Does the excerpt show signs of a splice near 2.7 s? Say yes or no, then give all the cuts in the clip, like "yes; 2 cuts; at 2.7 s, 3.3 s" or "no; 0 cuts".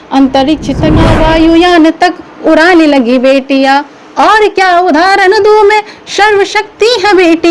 no; 1 cut; at 1.0 s